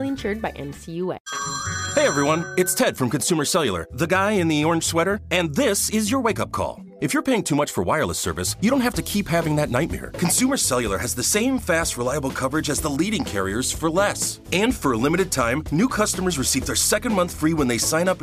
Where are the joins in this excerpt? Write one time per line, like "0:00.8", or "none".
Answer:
0:01.2